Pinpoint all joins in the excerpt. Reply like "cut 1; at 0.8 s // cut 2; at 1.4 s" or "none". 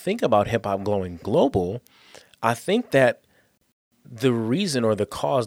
cut 1; at 1.2 s